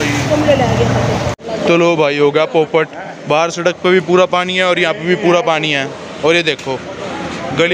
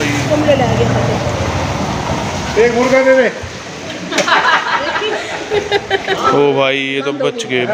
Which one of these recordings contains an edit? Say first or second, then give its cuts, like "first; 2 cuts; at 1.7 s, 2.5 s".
first; 1 cut; at 1.3 s